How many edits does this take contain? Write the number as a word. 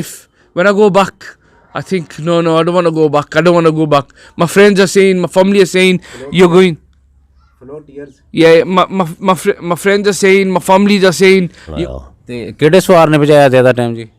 one